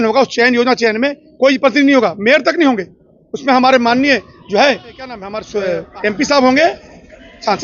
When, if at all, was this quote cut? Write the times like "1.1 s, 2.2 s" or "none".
5.4 s